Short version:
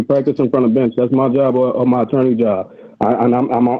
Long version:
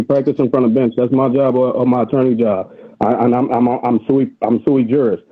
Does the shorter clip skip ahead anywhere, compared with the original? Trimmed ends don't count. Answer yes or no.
no